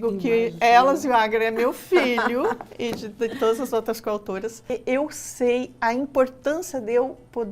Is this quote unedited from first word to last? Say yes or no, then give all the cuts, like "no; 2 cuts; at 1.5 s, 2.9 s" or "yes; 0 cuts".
no; 1 cut; at 4.7 s